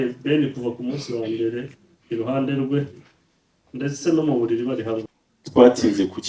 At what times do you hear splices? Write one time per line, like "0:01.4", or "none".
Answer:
0:05.0